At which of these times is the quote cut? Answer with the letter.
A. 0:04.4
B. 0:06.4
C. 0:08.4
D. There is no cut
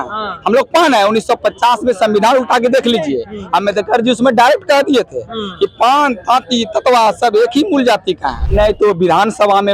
C